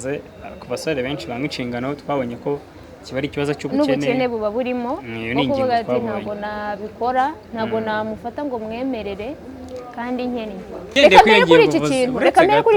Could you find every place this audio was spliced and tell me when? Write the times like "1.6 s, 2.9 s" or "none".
10.8 s

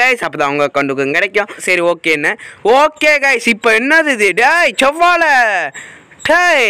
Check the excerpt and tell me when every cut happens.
1.6 s

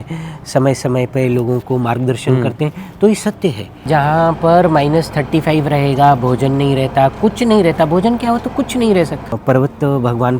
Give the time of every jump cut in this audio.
3.9 s, 9.4 s

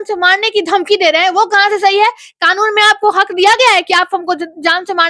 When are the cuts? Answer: none

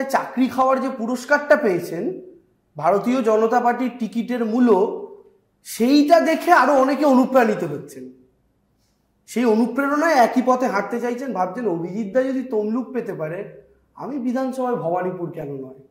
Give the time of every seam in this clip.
none

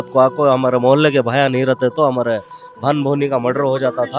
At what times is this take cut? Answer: none

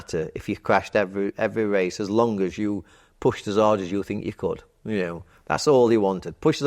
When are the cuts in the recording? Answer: none

